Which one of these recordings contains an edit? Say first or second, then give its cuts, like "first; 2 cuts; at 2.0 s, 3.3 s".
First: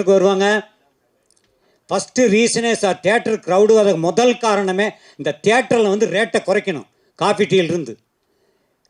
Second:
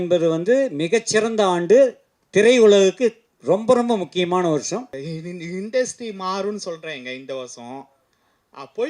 second; 1 cut; at 5.0 s